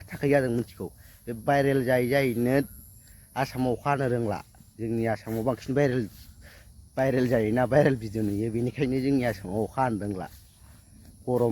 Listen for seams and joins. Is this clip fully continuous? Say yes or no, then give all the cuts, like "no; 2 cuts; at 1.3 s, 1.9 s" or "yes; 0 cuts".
yes; 0 cuts